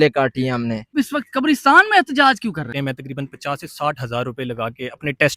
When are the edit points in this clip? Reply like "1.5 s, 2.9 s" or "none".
0.9 s, 2.9 s